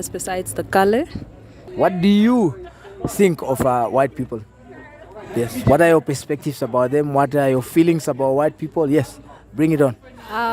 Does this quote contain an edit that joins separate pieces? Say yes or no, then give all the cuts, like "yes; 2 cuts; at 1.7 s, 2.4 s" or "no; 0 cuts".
yes; 1 cut; at 1.6 s